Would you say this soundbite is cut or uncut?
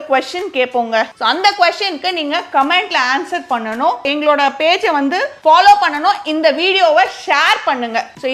cut